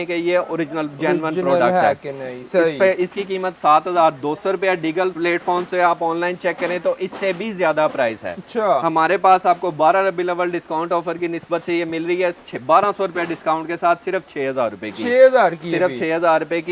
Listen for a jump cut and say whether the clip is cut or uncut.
uncut